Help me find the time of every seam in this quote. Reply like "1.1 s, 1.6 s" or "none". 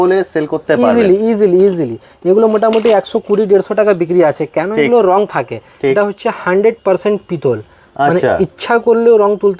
none

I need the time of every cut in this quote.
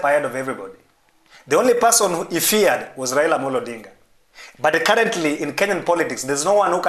none

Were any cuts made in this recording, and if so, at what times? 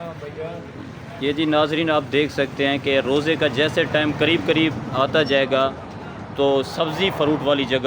none

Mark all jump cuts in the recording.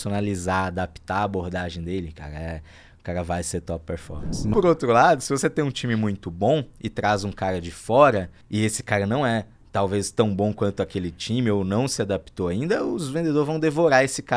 4.5 s, 8.4 s

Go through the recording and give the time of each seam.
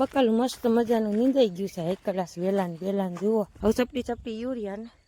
3.5 s

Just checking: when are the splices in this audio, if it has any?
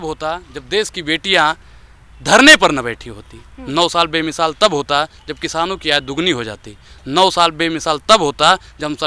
none

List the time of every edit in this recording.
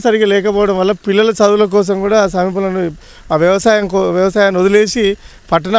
none

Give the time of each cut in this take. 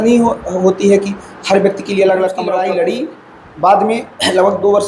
2.5 s

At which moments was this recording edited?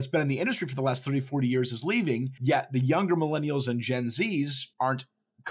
2.3 s, 4.6 s

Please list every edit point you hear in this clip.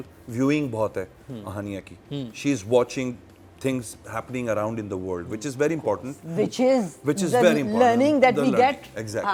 none

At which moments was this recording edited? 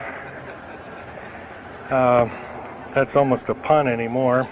none

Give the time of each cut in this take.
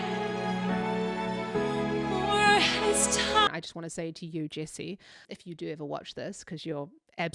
3.5 s, 5.2 s

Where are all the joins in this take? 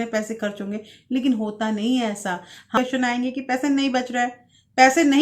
2.8 s

